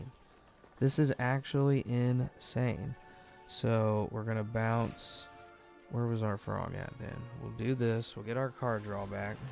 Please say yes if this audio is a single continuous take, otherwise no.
yes